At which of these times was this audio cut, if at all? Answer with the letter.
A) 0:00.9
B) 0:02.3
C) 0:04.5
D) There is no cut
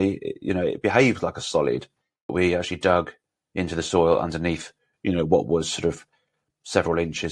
B